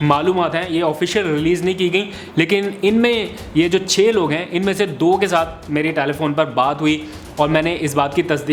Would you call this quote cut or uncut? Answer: uncut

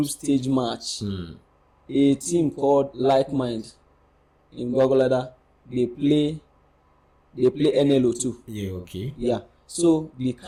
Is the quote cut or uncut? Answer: uncut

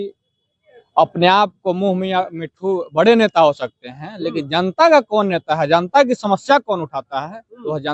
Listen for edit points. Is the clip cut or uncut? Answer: uncut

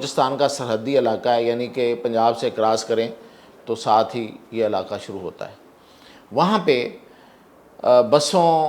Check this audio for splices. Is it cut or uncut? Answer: uncut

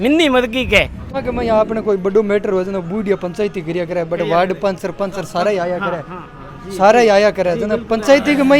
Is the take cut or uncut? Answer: cut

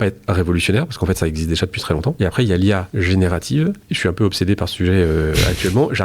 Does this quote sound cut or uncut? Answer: cut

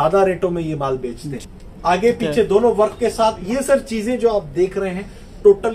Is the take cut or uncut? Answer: cut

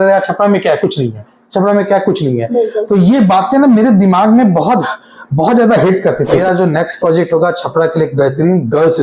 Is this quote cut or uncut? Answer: cut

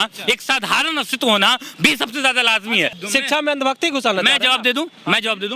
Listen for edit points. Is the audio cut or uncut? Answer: cut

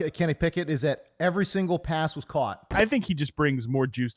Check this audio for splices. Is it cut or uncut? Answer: cut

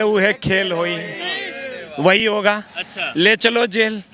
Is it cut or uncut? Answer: uncut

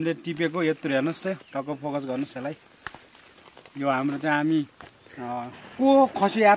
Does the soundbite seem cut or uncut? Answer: uncut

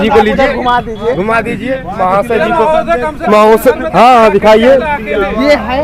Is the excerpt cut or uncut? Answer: uncut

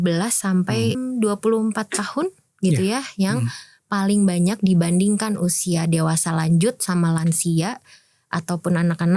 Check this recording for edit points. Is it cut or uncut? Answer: cut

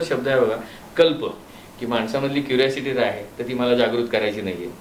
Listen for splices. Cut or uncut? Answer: cut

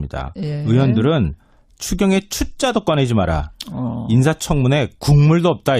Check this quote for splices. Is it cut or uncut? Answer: uncut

